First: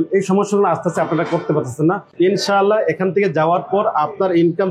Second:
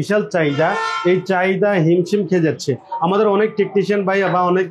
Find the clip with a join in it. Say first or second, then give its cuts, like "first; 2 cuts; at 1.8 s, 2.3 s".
first; 1 cut; at 2.0 s